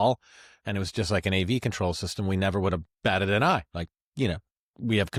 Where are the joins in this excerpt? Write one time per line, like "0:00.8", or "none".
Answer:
none